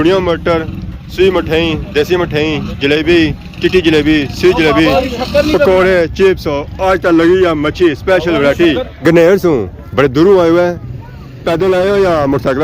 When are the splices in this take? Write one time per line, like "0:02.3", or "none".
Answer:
0:08.8